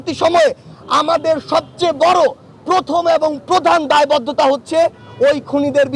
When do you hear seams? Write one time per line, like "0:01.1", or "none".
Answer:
none